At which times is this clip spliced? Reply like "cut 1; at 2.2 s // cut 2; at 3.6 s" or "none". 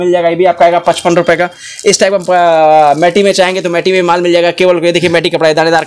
none